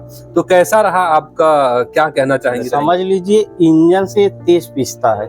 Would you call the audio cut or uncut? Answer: cut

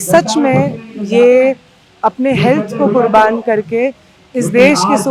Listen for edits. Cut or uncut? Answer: uncut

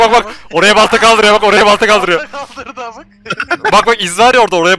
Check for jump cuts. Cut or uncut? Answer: uncut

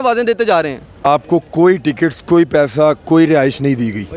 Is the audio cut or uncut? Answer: cut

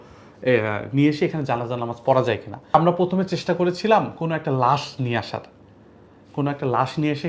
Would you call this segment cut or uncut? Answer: cut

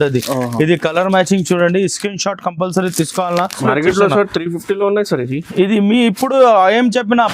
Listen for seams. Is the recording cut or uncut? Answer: cut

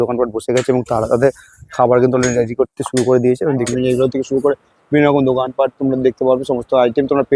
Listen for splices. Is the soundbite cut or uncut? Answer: cut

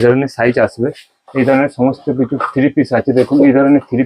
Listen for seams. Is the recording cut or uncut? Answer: uncut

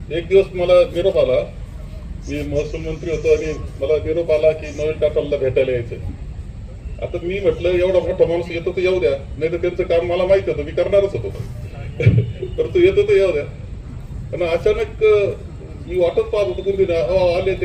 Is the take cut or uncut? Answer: uncut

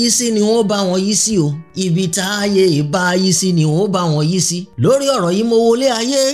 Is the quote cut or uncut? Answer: uncut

